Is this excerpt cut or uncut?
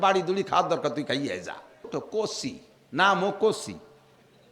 cut